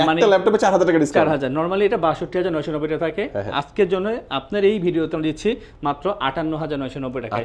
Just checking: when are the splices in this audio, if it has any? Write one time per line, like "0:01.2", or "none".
none